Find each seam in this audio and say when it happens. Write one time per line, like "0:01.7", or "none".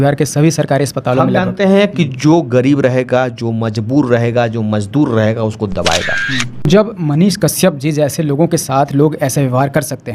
0:06.7